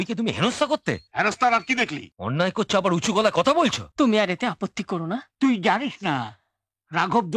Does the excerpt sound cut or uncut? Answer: cut